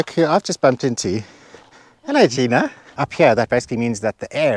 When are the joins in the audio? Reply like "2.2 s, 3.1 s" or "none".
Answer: 2.8 s